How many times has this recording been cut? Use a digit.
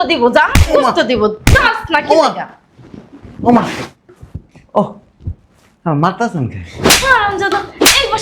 0